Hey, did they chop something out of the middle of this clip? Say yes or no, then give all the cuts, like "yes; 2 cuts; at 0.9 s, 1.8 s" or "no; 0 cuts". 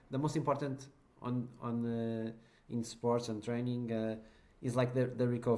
no; 0 cuts